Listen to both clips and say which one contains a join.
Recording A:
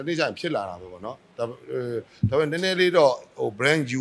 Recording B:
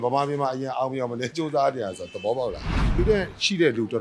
B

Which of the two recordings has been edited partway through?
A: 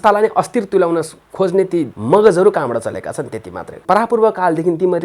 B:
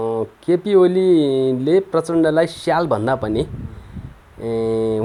A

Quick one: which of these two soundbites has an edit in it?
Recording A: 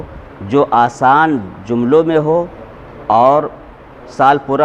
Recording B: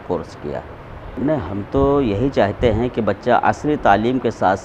B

